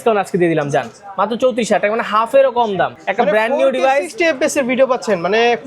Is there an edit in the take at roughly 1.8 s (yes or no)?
no